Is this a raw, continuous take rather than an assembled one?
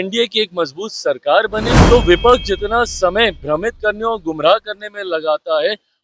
no; 1 cut; at 1.7 s

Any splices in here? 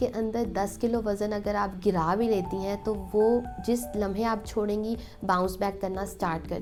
no; 0 cuts

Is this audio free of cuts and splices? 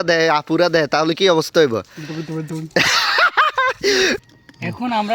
no; 1 cut; at 4.2 s

